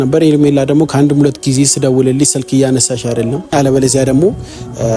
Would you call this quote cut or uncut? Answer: cut